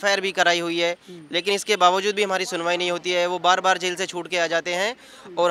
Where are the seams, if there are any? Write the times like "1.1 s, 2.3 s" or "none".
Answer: none